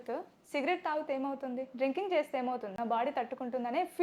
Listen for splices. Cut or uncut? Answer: cut